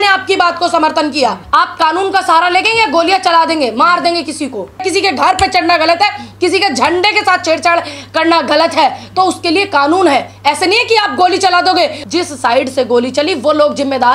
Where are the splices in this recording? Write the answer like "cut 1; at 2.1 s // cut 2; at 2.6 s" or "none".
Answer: cut 1; at 1.4 s // cut 2; at 4.8 s // cut 3; at 12.0 s